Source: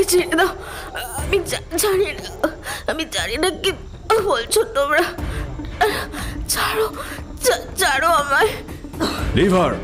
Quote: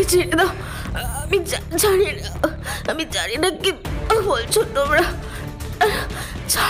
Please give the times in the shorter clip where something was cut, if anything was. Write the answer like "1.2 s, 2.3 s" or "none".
none